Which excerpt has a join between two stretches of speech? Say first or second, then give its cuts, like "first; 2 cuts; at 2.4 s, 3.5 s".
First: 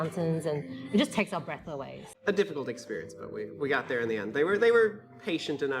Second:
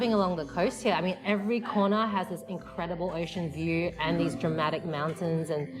first; 1 cut; at 2.1 s